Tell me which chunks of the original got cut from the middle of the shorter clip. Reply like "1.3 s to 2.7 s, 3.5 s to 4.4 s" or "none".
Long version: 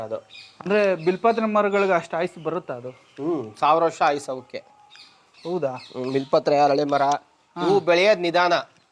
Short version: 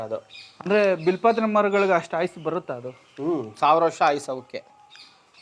none